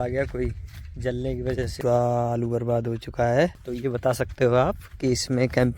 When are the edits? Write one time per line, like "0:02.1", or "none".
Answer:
0:01.7
0:03.6